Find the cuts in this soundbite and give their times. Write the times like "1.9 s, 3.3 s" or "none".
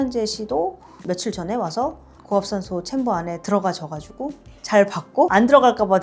none